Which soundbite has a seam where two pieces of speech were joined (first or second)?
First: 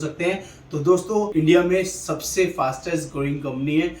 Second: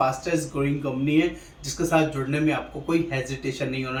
first